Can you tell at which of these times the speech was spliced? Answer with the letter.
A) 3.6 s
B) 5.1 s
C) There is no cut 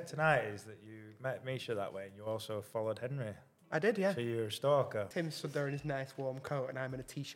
B